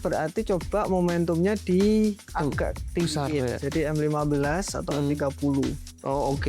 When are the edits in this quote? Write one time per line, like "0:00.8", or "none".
none